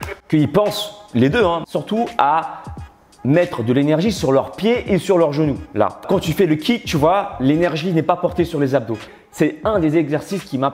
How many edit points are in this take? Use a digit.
3